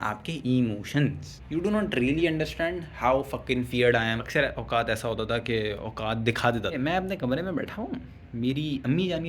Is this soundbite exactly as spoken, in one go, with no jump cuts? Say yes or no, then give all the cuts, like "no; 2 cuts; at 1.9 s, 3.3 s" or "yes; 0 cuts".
no; 3 cuts; at 1.3 s, 4.2 s, 6.7 s